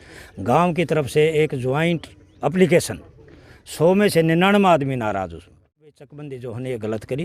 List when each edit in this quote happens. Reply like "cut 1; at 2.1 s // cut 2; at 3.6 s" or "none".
cut 1; at 6.0 s